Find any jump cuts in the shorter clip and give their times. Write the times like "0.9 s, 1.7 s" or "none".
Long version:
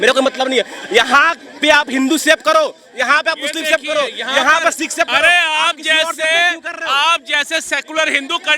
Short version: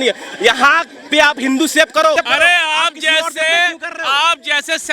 2.2 s